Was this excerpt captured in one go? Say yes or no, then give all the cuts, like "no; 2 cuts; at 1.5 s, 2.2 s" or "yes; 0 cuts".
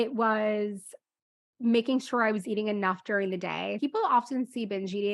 no; 1 cut; at 3.8 s